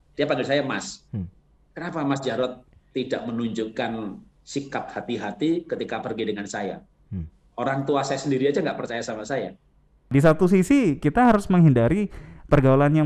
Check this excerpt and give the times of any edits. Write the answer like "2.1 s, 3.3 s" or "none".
10.1 s